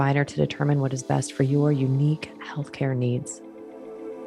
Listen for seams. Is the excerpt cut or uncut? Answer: cut